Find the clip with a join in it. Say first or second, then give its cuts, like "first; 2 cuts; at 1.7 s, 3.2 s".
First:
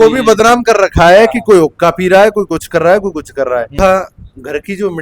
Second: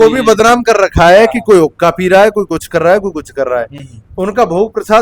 first; 1 cut; at 3.7 s